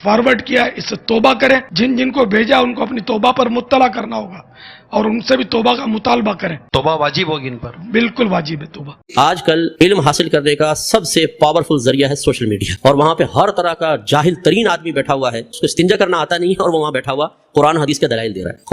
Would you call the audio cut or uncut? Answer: cut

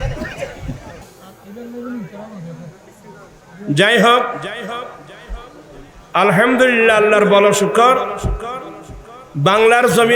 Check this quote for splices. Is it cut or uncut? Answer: cut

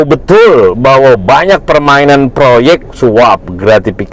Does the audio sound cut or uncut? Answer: cut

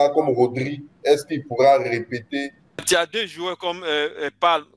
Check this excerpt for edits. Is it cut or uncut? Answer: cut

